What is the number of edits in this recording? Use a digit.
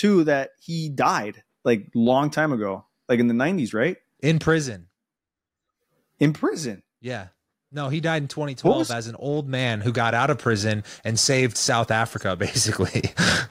0